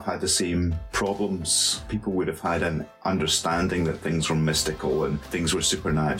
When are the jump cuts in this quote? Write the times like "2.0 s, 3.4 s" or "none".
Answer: 1.9 s, 5.2 s